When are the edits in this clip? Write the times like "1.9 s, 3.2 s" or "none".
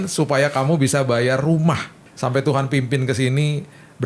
2.0 s